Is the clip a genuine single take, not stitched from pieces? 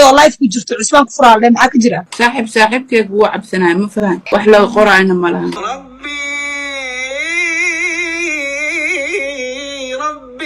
no; 3 cuts; at 2.1 s, 4.2 s, 5.6 s

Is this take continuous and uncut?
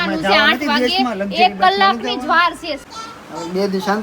no; 1 cut; at 2.8 s

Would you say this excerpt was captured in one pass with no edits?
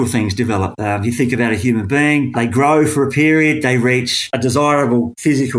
yes; 0 cuts

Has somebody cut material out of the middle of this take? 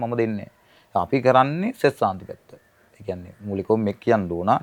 no; 0 cuts

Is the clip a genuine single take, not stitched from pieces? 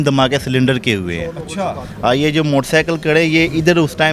yes; 0 cuts

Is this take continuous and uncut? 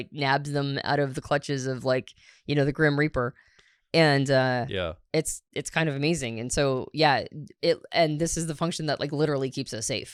yes; 0 cuts

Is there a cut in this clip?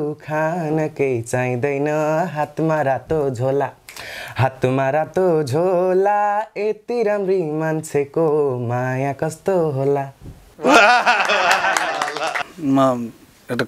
yes; 1 cut; at 12.4 s

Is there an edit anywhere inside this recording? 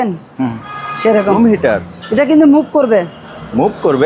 yes; 1 cut; at 1.3 s

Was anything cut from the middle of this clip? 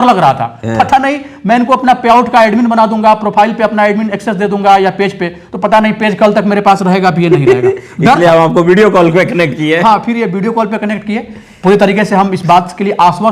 no; 0 cuts

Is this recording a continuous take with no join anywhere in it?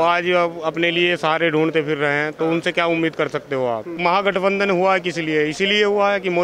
no; 1 cut; at 3.9 s

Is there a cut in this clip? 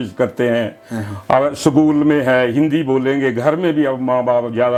no; 0 cuts

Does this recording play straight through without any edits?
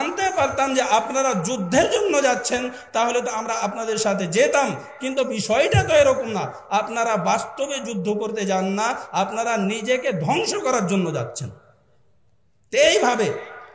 yes; 0 cuts

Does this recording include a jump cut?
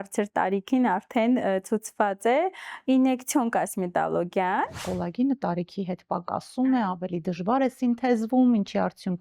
yes; 1 cut; at 4.8 s

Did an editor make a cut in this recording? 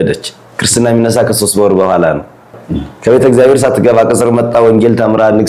no; 0 cuts

